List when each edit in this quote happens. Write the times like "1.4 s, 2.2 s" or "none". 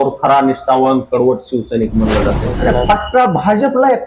2.5 s